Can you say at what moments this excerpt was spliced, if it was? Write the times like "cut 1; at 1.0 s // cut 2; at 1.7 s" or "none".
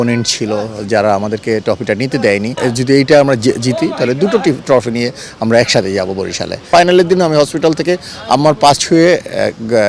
cut 1; at 2.6 s // cut 2; at 6.7 s